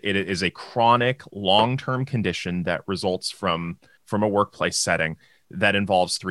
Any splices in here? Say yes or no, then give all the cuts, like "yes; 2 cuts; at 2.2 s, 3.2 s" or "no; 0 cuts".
no; 0 cuts